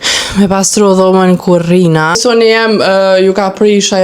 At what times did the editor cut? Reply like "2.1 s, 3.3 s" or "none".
2.2 s